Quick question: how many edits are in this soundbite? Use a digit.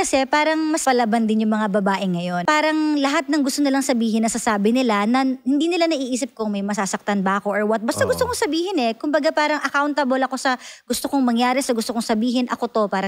2